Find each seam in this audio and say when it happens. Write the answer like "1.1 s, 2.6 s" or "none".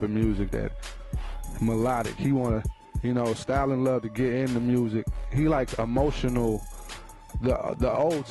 none